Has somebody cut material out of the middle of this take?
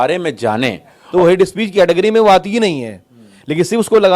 yes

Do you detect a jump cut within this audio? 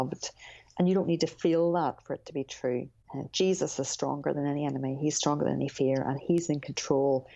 yes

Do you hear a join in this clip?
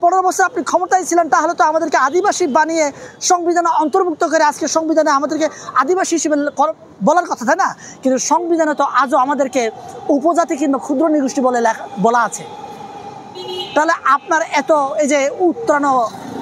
no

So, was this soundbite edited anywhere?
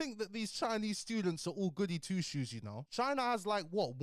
no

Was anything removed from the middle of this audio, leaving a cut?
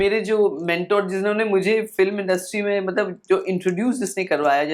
no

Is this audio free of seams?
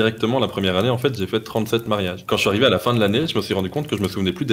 yes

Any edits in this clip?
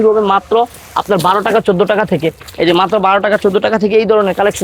no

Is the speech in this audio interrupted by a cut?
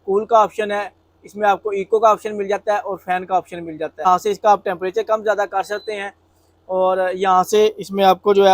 yes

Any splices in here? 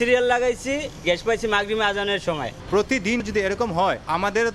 yes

